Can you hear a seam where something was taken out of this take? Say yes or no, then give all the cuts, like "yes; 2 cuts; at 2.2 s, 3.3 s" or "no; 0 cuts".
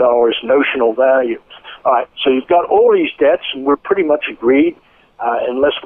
no; 0 cuts